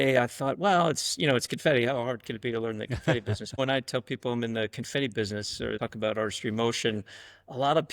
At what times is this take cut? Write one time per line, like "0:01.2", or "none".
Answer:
0:03.6
0:05.8